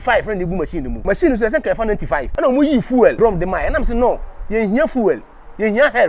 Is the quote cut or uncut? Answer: cut